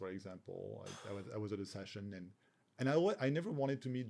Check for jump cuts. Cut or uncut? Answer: uncut